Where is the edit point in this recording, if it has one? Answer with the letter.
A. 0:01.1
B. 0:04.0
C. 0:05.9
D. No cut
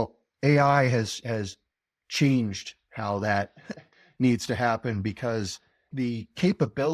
C